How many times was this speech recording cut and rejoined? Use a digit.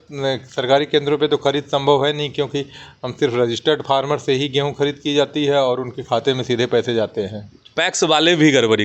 1